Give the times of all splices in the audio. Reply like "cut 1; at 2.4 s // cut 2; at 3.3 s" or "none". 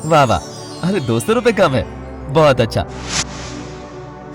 cut 1; at 2.8 s

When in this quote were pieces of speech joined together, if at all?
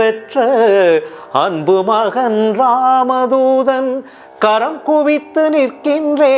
none

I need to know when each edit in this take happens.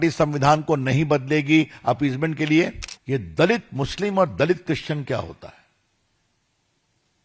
cut 1; at 2.9 s

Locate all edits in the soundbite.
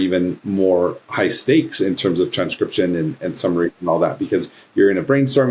none

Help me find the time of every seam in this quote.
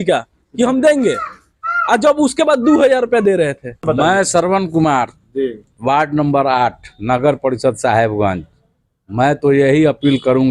cut 1; at 3.8 s

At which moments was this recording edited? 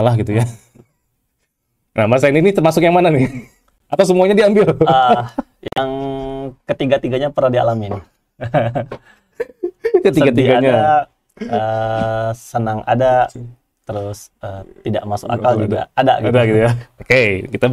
none

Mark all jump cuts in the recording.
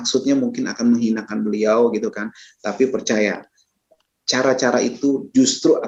none

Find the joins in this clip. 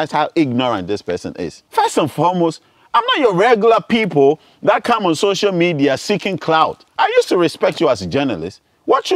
cut 1; at 1.5 s // cut 2; at 6.8 s

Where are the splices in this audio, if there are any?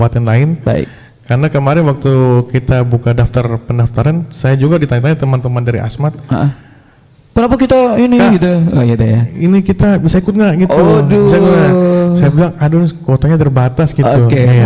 none

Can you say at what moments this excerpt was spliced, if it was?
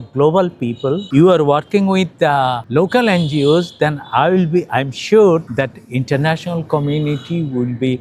cut 1; at 1.0 s // cut 2; at 2.6 s // cut 3; at 5.5 s

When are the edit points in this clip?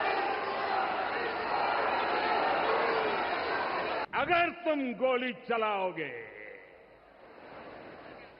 cut 1; at 4.0 s

